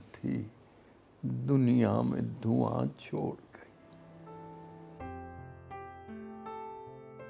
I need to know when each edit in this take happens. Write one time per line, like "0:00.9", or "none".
0:03.8